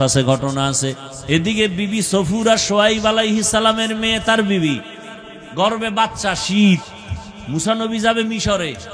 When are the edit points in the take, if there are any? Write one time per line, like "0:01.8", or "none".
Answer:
0:01.1